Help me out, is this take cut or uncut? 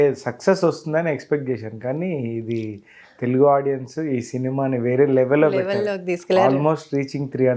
uncut